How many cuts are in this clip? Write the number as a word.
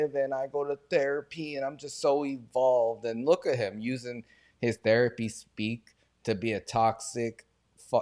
zero